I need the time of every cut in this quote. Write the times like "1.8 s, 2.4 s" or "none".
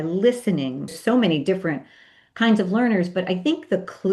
1.0 s